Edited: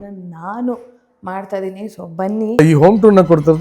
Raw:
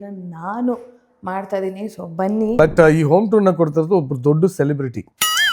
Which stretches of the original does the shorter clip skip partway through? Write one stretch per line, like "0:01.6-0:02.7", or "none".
0:02.6-0:02.9